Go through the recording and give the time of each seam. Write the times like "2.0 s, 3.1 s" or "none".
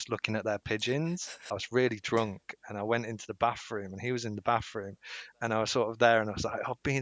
1.5 s